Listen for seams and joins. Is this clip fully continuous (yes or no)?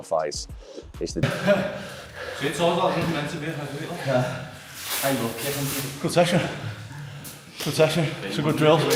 no